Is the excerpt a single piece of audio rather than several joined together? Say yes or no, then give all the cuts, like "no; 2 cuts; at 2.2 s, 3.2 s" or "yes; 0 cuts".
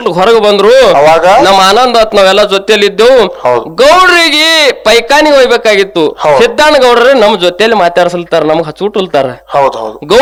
yes; 0 cuts